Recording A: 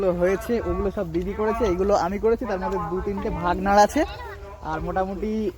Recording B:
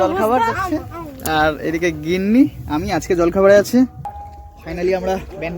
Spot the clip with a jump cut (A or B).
B